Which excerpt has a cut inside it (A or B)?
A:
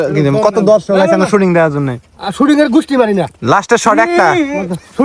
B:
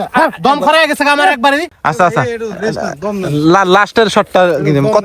B